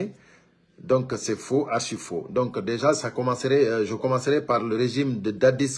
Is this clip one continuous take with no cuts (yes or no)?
yes